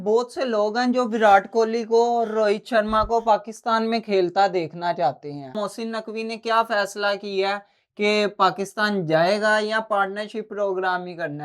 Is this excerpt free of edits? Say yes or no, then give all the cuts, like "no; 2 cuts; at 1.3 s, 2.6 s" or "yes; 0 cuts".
no; 1 cut; at 5.5 s